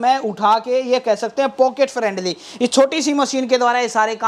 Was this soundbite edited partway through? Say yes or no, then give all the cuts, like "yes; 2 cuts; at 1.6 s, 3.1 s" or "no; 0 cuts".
no; 0 cuts